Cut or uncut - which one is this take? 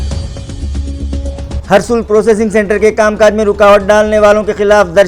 cut